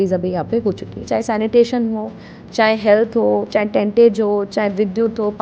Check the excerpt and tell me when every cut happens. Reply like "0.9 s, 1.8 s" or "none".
1.1 s